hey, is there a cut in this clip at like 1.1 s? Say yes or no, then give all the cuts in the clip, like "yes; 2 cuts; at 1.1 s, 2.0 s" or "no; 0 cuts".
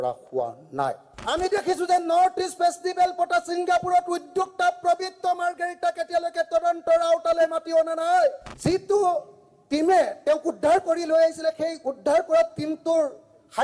yes; 2 cuts; at 1.1 s, 8.5 s